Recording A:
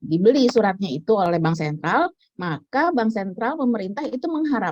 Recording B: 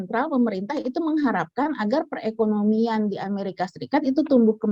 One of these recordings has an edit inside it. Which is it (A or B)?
A